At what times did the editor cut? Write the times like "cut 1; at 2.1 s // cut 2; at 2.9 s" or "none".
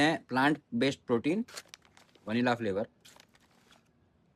none